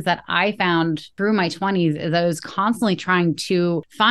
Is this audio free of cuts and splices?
no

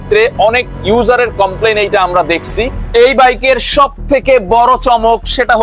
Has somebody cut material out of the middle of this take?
yes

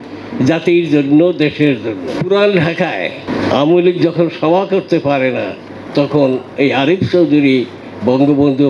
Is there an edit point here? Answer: yes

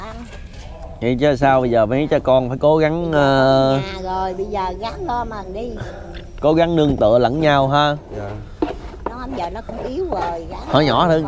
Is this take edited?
no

